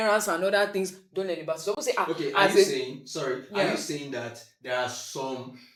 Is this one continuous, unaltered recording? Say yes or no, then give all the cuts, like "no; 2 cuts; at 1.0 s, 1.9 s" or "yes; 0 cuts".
yes; 0 cuts